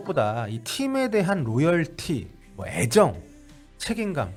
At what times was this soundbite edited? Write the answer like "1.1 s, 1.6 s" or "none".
none